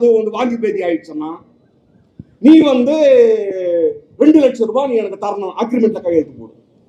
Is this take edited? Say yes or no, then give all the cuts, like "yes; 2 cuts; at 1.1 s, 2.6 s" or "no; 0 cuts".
no; 0 cuts